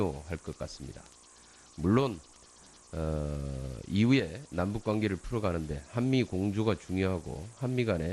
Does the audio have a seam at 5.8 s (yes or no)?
yes